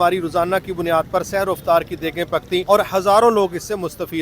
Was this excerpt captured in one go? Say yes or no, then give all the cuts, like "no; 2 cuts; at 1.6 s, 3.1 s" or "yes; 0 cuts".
no; 1 cut; at 2.6 s